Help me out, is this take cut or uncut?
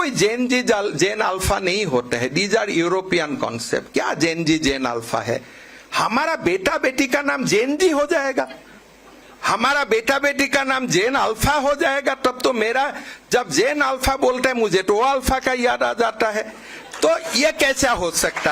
uncut